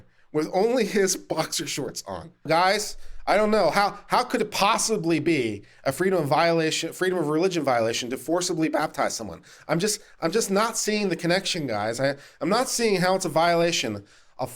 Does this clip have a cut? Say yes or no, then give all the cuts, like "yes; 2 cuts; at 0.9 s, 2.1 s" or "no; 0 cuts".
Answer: yes; 1 cut; at 2.4 s